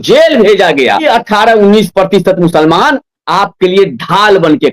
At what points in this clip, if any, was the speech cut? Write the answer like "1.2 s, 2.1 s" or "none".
1.0 s